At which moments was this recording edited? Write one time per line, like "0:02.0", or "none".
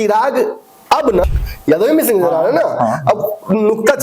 0:01.2